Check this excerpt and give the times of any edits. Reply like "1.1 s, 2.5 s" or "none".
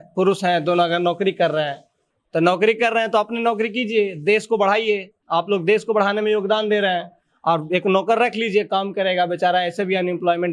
none